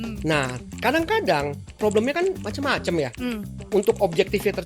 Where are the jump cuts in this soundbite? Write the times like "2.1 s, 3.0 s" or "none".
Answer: 2.5 s, 3.5 s